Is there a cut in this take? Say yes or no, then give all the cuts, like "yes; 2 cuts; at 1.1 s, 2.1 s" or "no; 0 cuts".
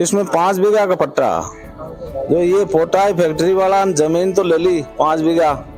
no; 0 cuts